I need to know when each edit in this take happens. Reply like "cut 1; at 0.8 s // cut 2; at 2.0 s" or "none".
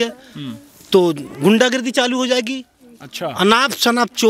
none